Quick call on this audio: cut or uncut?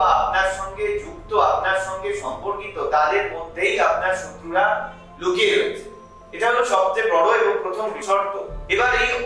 uncut